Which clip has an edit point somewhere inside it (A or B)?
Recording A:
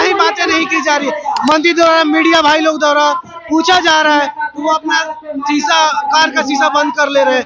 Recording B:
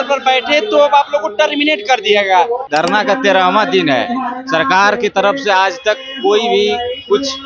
B